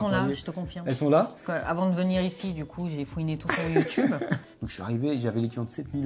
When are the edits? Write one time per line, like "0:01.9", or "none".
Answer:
0:04.5